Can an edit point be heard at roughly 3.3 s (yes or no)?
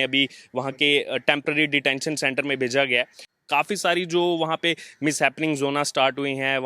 yes